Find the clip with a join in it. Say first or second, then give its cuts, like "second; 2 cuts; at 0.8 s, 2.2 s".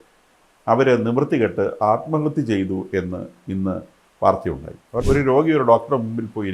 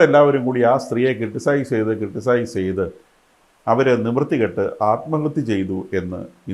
first; 1 cut; at 5.0 s